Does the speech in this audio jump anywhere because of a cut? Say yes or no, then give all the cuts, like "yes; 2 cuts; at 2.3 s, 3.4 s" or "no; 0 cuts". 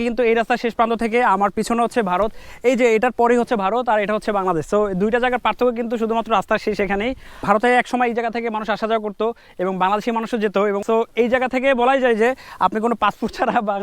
yes; 2 cuts; at 7.3 s, 10.8 s